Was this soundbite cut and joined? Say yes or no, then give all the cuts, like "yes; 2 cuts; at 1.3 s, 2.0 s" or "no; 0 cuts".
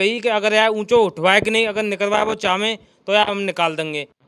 no; 0 cuts